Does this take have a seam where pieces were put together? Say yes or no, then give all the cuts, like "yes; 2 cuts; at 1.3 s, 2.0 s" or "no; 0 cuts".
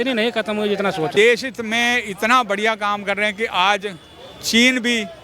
yes; 1 cut; at 1.1 s